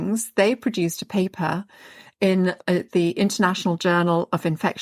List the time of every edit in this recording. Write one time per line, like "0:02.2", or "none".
0:02.6